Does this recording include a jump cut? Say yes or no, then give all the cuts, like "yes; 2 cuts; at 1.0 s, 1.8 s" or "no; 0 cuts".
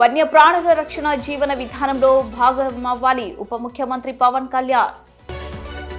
no; 0 cuts